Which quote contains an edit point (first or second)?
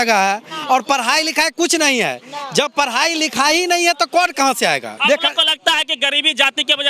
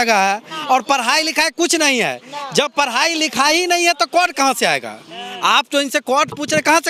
first